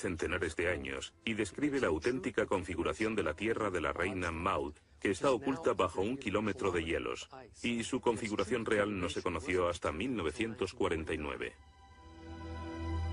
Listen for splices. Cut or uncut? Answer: uncut